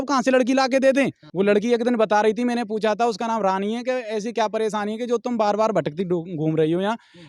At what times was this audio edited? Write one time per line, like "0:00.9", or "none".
0:01.2